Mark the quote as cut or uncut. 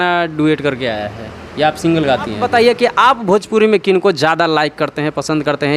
cut